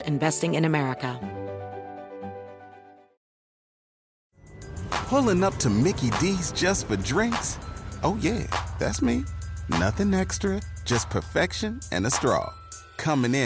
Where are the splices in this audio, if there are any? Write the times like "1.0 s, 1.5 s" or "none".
1.2 s